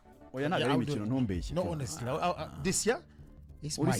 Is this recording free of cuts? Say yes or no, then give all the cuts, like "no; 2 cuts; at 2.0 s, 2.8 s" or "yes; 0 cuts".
yes; 0 cuts